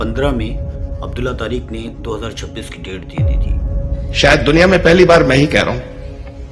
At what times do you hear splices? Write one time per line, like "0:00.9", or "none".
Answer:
none

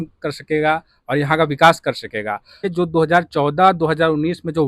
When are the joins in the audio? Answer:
0:02.7

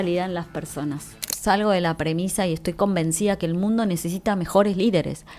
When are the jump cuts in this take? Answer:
0:01.3

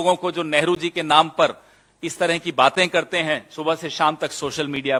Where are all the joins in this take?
none

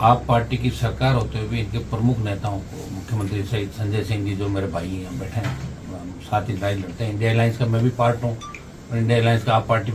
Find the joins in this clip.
none

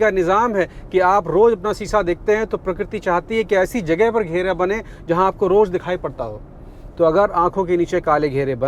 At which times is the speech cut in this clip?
none

